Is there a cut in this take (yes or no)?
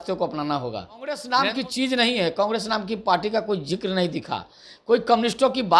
yes